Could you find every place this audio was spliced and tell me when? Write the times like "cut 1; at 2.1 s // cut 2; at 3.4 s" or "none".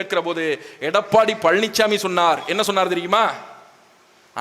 none